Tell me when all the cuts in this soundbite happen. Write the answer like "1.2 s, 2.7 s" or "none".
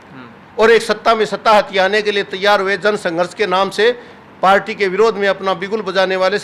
none